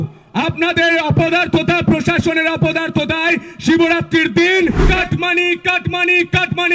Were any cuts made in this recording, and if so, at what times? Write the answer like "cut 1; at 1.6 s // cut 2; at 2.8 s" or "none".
cut 1; at 4.8 s